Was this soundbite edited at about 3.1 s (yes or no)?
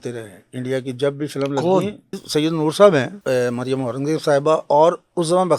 yes